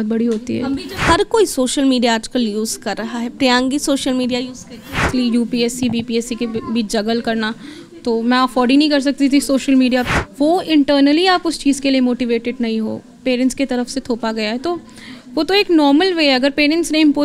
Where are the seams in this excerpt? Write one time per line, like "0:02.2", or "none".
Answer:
0:00.9
0:05.1
0:10.1